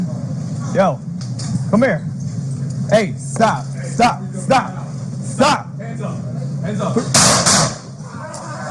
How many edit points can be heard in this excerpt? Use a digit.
1